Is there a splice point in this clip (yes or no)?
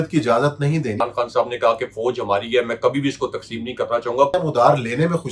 yes